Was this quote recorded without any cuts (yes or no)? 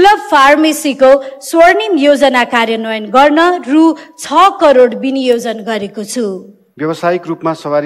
no